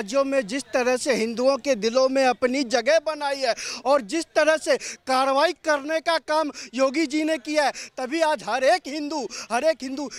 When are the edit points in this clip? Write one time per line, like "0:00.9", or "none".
none